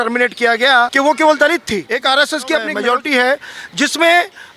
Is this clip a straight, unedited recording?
no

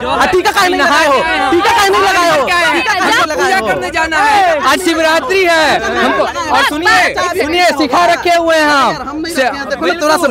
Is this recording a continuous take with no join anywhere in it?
yes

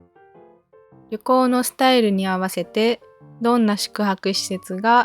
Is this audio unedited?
no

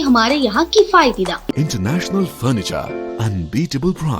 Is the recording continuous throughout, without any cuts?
no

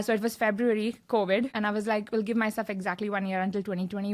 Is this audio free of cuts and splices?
no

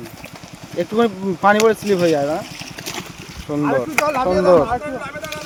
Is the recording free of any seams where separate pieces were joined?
yes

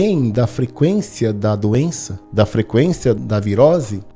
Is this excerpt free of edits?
no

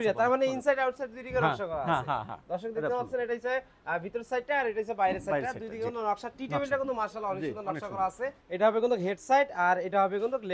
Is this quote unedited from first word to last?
no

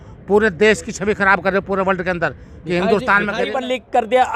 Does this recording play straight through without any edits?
no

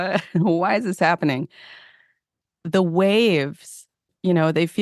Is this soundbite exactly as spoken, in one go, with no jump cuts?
no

